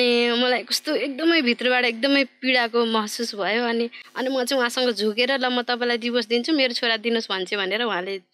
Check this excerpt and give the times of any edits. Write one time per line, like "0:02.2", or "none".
0:04.0